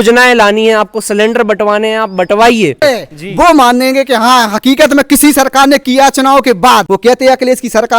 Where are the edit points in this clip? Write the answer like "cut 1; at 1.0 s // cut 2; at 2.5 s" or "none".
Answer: cut 1; at 2.8 s // cut 2; at 6.9 s